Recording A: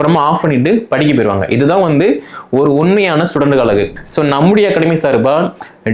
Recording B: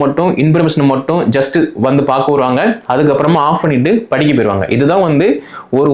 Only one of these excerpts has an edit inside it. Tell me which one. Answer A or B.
A